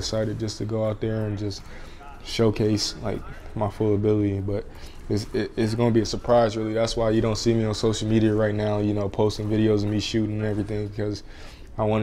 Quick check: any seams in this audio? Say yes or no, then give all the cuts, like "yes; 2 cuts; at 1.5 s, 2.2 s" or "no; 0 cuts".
no; 0 cuts